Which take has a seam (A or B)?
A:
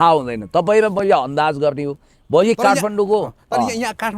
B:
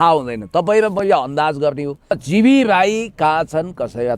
B